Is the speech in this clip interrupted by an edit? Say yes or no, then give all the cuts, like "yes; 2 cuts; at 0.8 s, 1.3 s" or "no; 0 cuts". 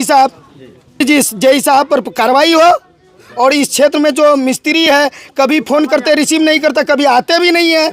yes; 1 cut; at 1.0 s